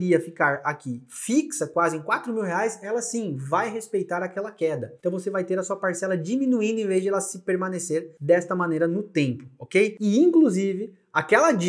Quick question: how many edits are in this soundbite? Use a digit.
3